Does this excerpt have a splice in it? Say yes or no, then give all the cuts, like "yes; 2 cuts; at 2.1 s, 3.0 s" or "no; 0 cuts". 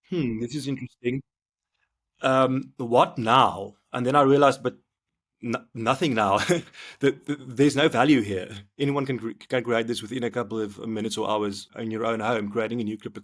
yes; 1 cut; at 11.7 s